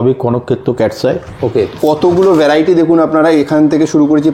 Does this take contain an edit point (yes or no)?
yes